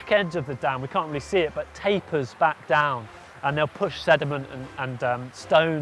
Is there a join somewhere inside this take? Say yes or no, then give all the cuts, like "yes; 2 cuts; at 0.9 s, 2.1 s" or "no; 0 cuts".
no; 0 cuts